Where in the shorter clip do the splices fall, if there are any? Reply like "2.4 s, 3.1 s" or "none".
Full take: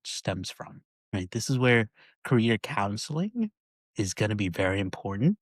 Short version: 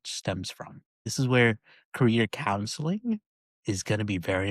1.0 s